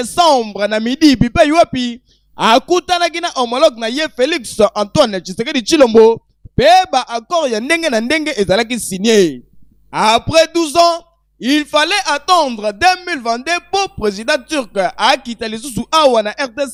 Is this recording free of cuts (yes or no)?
yes